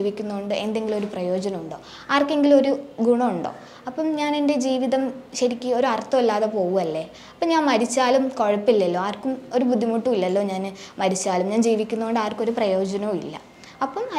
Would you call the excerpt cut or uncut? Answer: uncut